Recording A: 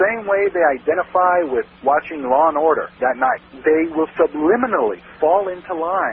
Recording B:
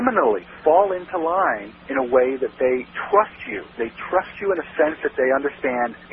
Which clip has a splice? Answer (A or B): A